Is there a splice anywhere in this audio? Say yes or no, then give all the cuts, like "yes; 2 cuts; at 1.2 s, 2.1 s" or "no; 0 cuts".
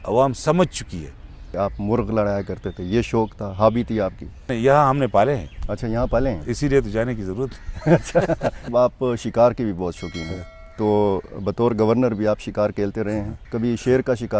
yes; 4 cuts; at 1.5 s, 4.5 s, 8.7 s, 13.4 s